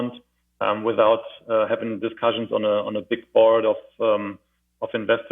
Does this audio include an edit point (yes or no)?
no